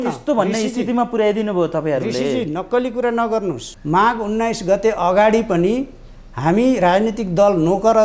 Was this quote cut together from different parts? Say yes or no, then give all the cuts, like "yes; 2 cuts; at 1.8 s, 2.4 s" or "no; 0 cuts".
yes; 1 cut; at 3.7 s